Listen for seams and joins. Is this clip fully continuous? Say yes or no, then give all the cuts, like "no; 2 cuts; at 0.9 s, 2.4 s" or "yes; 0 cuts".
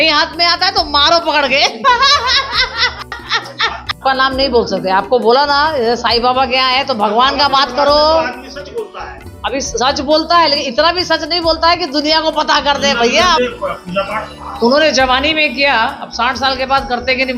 no; 3 cuts; at 4.0 s, 13.4 s, 14.4 s